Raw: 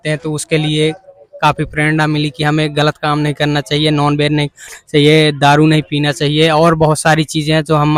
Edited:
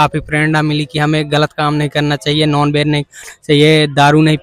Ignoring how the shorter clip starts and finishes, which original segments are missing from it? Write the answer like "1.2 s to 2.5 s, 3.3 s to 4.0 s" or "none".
none

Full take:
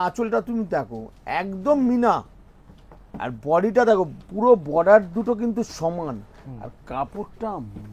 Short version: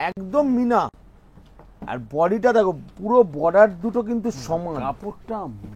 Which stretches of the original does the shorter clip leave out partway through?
6.1 s to 6.9 s

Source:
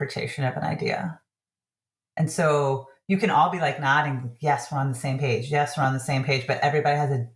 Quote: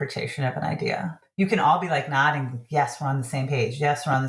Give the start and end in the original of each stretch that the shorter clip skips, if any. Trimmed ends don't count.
1.2 s to 2.9 s

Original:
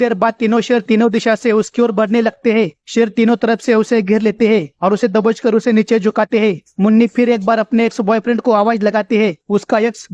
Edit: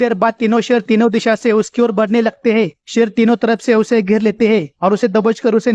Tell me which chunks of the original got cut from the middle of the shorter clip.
none

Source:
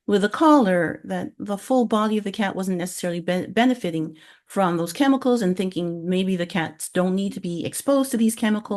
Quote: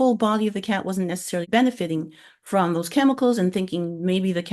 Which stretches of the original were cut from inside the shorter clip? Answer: 3.2 s to 3.5 s

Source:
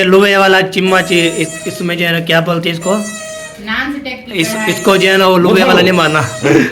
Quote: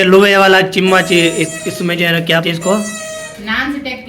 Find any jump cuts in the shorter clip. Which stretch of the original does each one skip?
2.4 s to 2.6 s

